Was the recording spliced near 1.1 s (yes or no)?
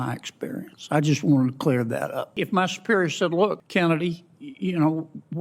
no